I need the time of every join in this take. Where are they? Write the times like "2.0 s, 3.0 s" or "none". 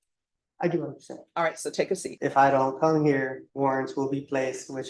1.7 s, 3.4 s

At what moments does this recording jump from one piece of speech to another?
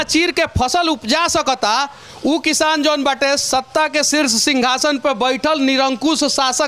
none

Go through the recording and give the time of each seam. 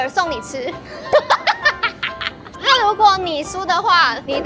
2.4 s

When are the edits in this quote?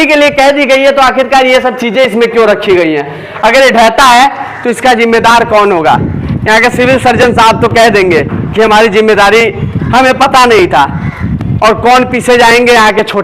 none

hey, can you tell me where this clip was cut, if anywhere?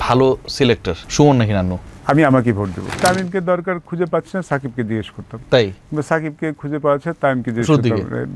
1.0 s, 1.9 s, 3.0 s

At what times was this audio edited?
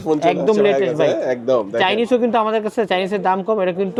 none

